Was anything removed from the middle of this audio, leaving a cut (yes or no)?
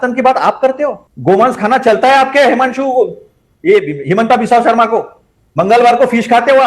yes